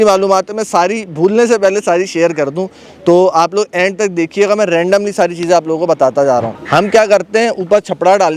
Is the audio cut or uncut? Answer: cut